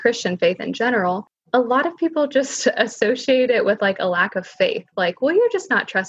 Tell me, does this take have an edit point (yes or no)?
yes